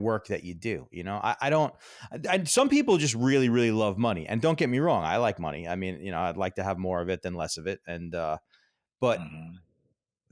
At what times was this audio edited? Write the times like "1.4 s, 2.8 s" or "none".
none